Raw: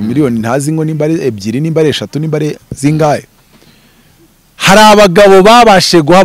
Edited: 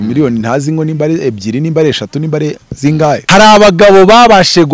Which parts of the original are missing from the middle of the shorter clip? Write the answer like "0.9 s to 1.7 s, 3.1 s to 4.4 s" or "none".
3.2 s to 4.6 s